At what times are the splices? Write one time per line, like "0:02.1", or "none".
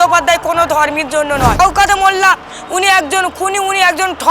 0:01.6